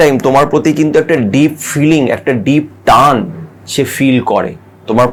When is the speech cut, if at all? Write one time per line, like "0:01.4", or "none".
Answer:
none